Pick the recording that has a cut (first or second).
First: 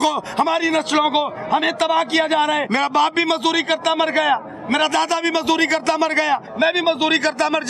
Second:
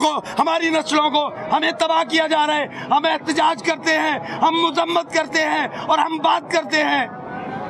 first